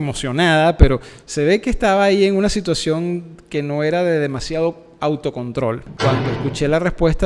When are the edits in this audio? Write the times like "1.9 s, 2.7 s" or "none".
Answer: 5.9 s